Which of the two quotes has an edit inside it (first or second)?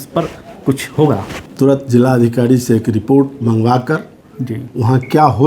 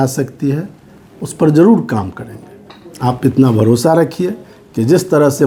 first